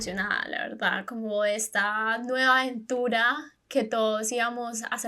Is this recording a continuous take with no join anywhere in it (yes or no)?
yes